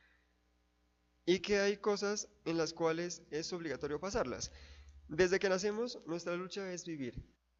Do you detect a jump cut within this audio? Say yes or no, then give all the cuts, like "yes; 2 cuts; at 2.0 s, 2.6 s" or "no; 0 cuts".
no; 0 cuts